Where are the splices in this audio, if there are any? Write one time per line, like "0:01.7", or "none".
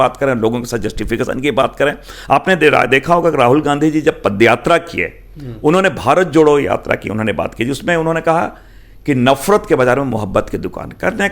none